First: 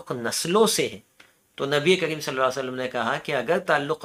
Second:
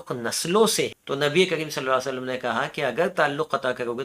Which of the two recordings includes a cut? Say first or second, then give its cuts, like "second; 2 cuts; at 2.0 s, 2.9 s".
second; 1 cut; at 1.0 s